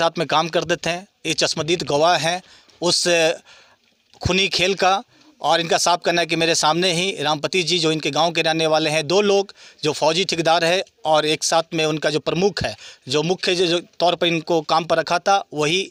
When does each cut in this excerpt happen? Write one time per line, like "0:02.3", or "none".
none